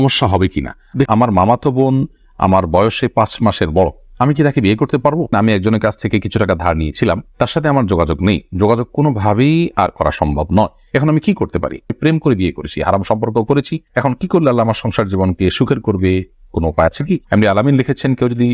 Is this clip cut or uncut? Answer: cut